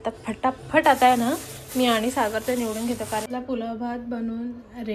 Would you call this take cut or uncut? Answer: cut